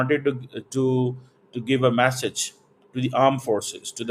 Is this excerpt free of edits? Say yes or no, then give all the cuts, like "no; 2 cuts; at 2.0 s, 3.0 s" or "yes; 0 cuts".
yes; 0 cuts